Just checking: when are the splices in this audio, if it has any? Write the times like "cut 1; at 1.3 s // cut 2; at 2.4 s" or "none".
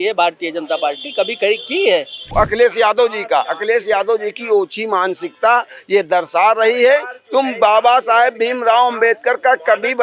cut 1; at 2.3 s

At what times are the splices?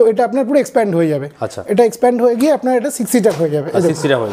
none

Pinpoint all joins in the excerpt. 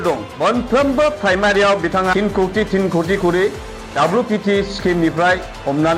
none

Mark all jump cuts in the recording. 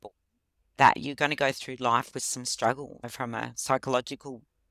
cut 1; at 3.0 s

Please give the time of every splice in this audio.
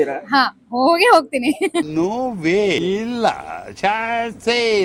none

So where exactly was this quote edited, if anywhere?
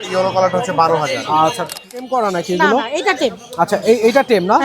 cut 1; at 1.8 s

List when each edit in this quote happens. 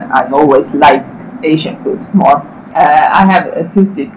cut 1; at 2.7 s

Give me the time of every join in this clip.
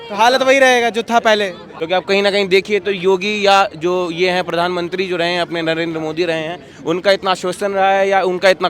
cut 1; at 1.7 s

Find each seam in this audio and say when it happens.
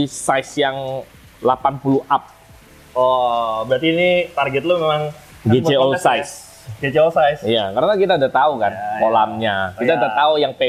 none

